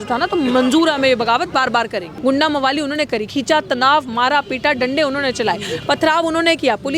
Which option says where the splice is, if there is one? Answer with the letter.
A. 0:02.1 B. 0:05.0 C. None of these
A